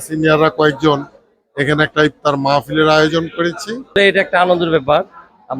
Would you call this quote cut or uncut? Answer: cut